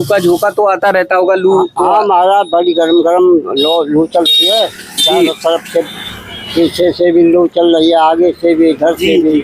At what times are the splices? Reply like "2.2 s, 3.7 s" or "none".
none